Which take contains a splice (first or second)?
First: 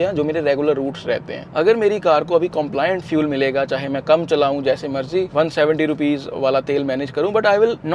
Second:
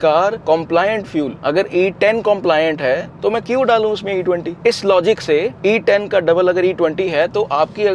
first